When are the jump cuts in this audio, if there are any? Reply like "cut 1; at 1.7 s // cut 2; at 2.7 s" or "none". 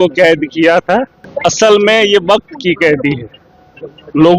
cut 1; at 1.2 s